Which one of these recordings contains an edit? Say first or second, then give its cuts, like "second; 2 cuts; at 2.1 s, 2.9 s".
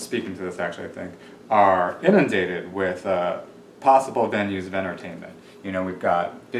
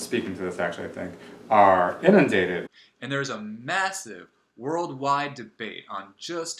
second; 1 cut; at 2.6 s